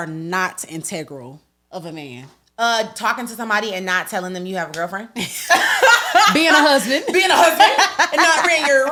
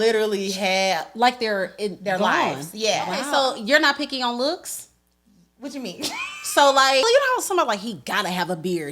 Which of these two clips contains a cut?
second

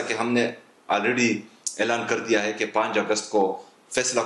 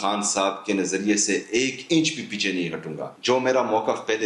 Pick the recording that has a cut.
second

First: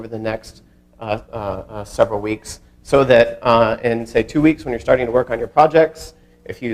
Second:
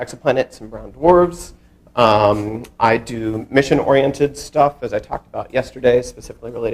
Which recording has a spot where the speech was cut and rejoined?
second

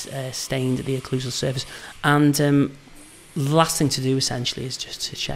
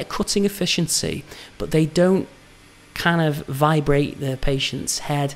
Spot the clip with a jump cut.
first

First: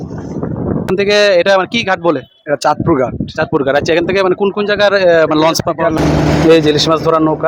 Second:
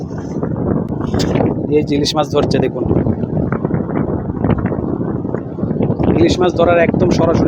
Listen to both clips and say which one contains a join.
first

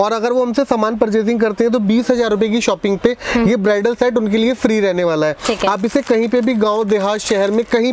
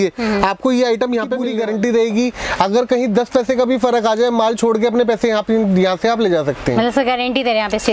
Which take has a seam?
second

